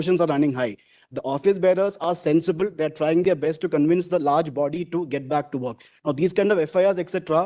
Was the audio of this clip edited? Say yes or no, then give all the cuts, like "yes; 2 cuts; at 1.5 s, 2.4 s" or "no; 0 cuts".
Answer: no; 0 cuts